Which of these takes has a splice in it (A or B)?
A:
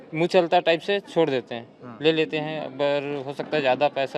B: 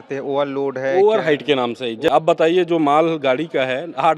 B